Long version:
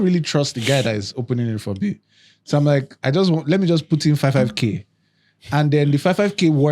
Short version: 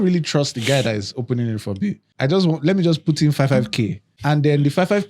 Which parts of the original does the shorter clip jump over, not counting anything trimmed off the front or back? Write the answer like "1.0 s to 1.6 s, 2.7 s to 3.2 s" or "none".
2.1 s to 2.9 s, 4.9 s to 5.3 s